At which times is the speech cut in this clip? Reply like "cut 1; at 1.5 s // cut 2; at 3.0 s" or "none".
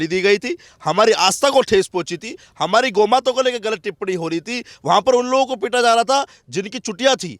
none